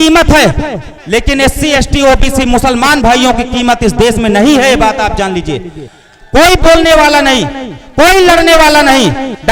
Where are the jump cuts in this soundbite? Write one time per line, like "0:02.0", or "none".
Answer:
0:00.9